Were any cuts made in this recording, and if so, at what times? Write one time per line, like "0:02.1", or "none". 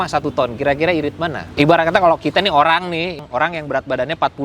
0:01.5
0:03.2